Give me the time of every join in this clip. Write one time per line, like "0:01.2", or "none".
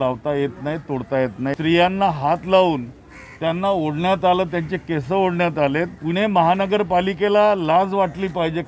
0:01.5
0:06.0